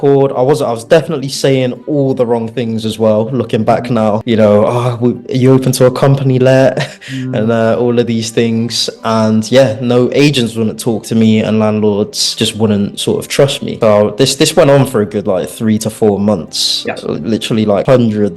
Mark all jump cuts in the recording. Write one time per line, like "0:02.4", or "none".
none